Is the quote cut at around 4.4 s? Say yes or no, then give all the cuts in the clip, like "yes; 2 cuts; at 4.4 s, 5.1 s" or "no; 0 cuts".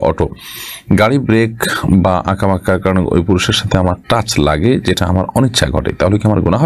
no; 0 cuts